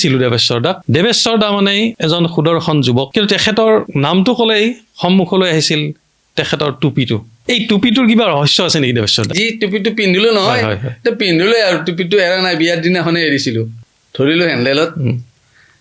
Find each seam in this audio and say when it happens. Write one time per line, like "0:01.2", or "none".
0:00.8
0:02.0
0:03.1
0:03.9
0:07.3
0:09.3
0:13.8